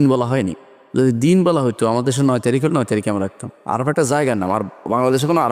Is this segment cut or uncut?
uncut